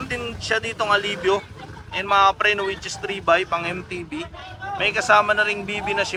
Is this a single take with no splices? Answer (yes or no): yes